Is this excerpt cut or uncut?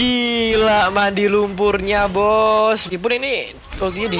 cut